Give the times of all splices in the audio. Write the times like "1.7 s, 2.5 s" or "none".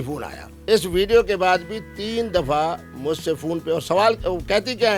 none